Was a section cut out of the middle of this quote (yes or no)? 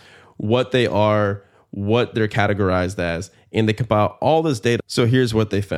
yes